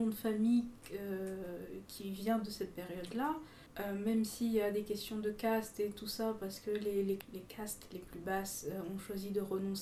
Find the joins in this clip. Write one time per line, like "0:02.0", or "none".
0:03.6
0:07.2